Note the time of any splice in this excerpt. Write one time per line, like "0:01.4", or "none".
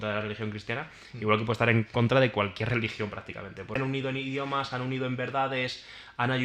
0:03.8